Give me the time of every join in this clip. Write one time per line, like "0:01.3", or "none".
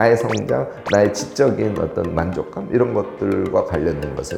none